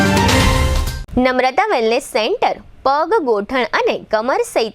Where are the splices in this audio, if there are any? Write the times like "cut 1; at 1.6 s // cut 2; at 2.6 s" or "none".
cut 1; at 0.9 s